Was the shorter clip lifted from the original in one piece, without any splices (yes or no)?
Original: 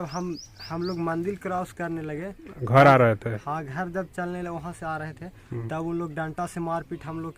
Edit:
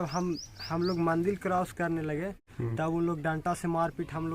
no